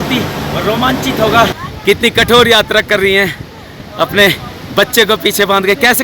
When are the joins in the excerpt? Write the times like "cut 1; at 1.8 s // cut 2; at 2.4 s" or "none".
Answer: cut 1; at 1.6 s